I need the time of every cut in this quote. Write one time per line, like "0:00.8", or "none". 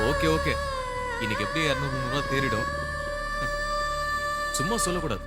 none